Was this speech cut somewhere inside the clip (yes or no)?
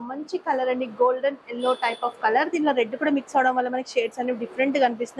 no